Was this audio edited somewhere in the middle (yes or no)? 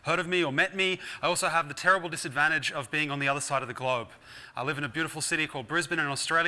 yes